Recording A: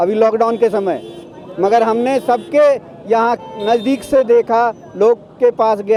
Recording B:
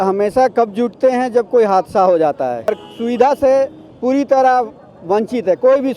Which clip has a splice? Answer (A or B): B